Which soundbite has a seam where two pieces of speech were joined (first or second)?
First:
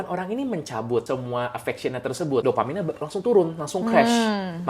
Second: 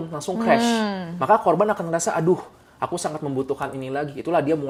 first